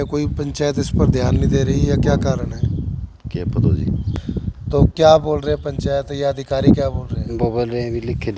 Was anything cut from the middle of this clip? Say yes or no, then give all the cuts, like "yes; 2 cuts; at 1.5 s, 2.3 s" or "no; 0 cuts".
yes; 1 cut; at 4.1 s